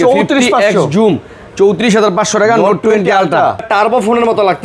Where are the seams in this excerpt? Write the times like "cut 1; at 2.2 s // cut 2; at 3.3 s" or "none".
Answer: cut 1; at 3.6 s